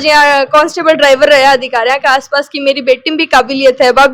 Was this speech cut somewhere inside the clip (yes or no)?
no